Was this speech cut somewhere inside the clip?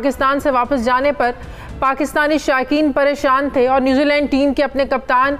no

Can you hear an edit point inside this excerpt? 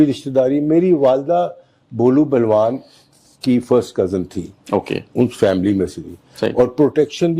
no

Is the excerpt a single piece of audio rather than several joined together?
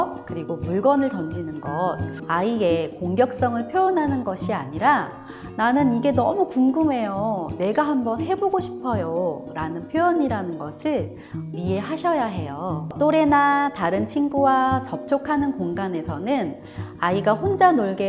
no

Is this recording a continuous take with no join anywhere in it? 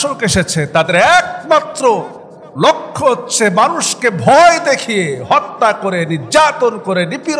yes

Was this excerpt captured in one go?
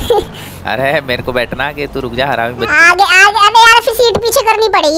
yes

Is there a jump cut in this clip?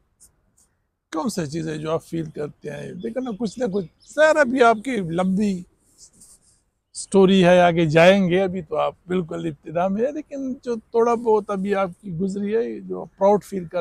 no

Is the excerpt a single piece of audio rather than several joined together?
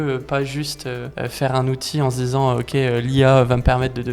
no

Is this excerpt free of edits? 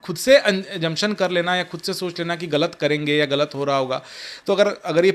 yes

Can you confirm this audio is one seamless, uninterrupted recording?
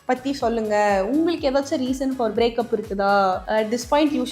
no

